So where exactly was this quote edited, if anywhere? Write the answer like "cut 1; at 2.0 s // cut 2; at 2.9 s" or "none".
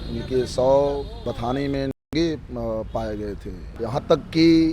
cut 1; at 1.1 s // cut 2; at 3.6 s